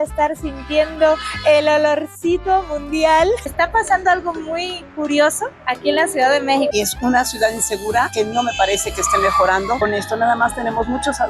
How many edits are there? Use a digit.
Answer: 2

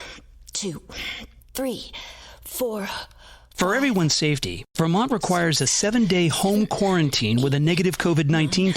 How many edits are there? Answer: 1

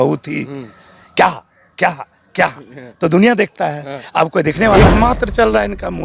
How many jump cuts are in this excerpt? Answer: 1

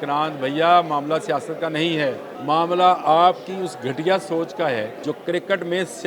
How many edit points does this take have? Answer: 2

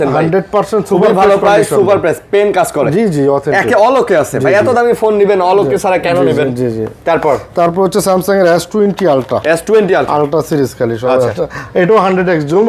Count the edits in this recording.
0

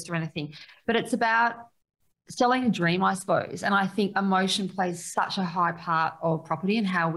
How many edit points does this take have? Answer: 0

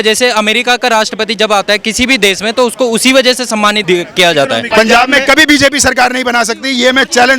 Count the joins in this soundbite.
2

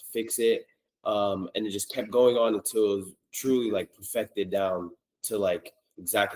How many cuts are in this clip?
0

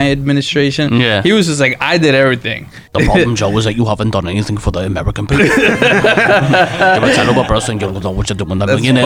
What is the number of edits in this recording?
1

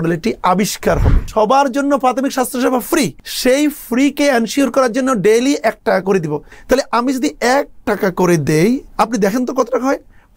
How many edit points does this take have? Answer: 4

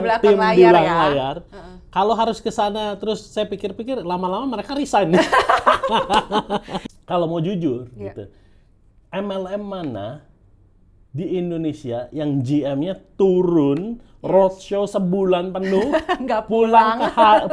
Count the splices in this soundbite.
1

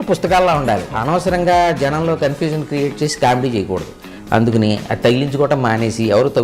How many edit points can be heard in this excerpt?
1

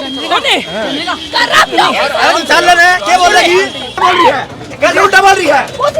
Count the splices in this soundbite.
1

